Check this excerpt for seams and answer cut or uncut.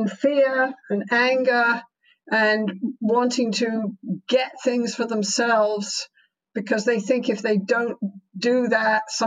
uncut